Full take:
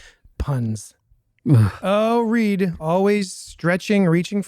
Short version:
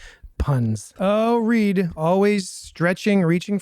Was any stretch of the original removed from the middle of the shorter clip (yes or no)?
yes